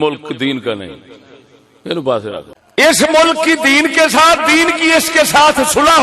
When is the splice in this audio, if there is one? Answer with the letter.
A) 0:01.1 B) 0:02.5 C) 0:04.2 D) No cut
B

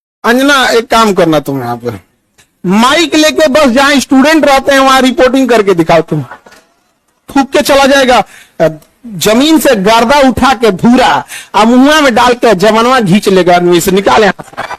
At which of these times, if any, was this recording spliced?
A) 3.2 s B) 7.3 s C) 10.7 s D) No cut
B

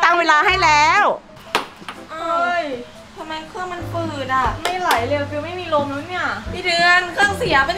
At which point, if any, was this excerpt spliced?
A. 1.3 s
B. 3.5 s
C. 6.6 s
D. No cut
A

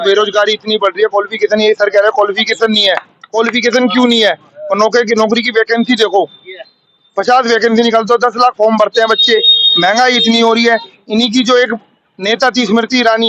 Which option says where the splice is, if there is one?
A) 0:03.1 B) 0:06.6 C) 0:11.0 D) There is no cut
D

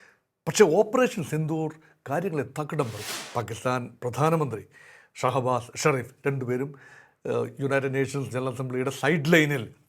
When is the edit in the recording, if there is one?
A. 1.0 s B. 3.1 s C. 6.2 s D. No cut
B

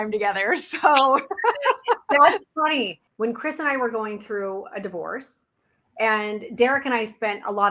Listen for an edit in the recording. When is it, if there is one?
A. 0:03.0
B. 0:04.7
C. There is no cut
A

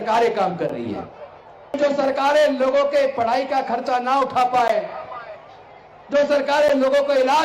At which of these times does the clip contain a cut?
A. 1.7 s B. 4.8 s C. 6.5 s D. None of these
A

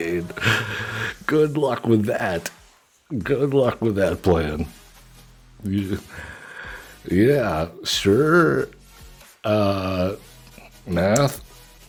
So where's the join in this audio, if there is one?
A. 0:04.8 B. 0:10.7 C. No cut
C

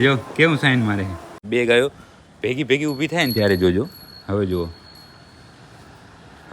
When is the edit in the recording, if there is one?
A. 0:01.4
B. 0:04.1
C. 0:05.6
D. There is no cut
A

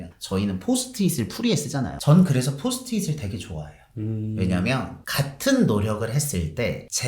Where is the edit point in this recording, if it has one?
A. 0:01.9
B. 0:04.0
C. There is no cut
A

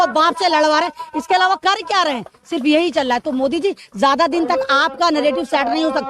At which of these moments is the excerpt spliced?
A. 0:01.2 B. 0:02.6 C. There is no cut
C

